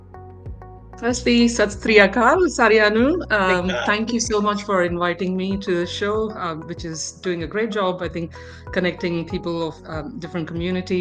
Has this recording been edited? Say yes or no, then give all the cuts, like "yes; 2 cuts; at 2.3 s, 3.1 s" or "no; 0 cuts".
yes; 1 cut; at 1.0 s